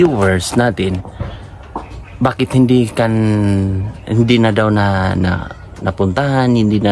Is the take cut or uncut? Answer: uncut